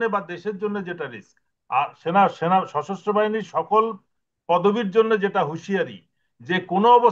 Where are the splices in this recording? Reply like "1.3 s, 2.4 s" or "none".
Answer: none